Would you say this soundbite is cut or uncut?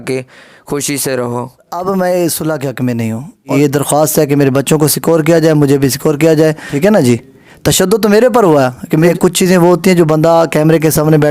cut